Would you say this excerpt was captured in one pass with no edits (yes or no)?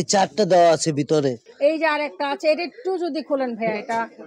no